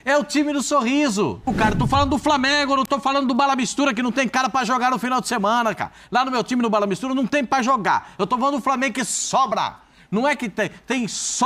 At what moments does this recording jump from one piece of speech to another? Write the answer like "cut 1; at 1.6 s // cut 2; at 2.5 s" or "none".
cut 1; at 1.5 s